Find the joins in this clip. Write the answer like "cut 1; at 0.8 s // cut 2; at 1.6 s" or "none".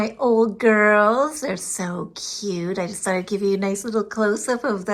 none